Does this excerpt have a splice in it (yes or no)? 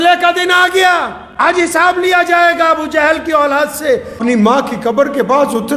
yes